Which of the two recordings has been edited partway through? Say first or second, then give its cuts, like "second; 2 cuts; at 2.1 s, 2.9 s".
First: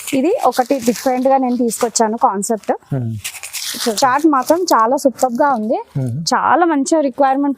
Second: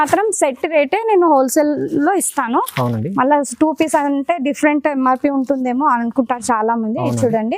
first; 1 cut; at 3.7 s